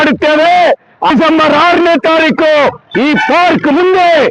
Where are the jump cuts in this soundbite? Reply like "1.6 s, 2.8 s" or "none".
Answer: 1.1 s